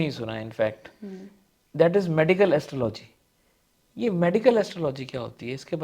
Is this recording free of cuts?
yes; 0 cuts

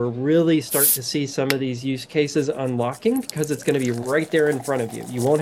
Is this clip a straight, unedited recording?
yes; 0 cuts

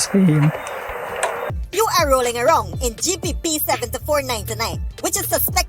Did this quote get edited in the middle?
yes; 1 cut; at 1.5 s

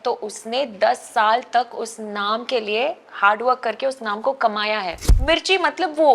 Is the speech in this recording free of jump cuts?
no; 1 cut; at 5.1 s

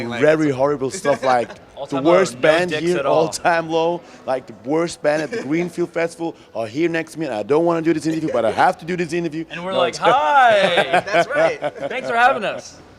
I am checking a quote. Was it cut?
yes; 1 cut; at 4.3 s

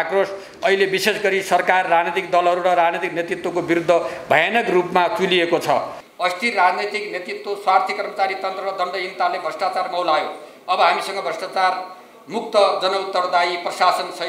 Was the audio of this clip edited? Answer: yes; 1 cut; at 6.0 s

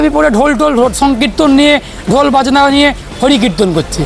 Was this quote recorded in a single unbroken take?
yes; 0 cuts

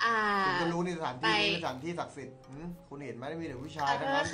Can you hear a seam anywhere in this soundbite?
no; 0 cuts

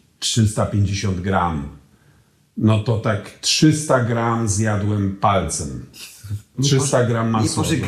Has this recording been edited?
no; 0 cuts

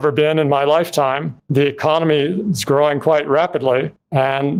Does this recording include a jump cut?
no; 0 cuts

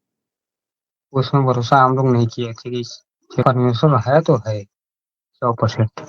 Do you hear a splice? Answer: yes; 1 cut; at 3.4 s

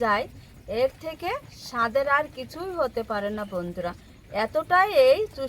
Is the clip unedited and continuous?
yes; 0 cuts

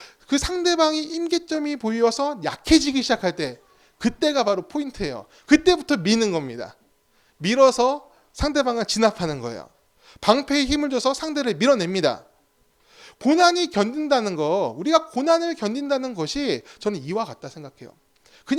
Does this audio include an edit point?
no; 0 cuts

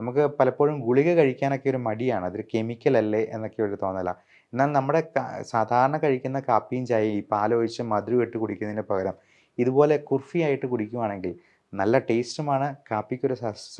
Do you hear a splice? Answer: no; 0 cuts

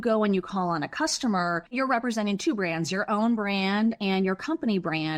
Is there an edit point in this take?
yes; 1 cut; at 1.7 s

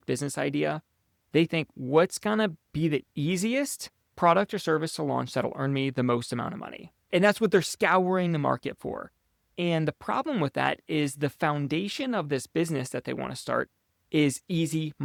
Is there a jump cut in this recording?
no; 0 cuts

